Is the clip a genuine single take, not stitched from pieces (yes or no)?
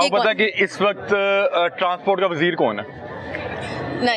yes